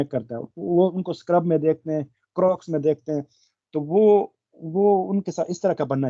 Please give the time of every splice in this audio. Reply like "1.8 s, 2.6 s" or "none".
none